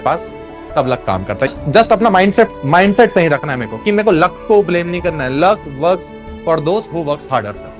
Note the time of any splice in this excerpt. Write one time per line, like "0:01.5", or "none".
0:01.5
0:02.6